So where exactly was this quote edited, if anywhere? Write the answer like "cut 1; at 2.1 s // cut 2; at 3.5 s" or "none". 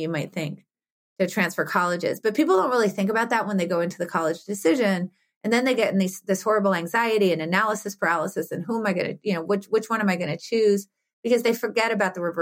none